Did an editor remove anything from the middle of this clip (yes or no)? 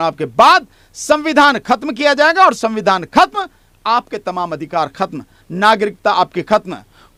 no